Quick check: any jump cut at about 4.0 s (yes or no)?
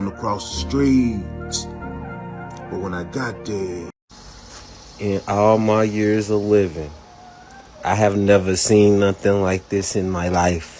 yes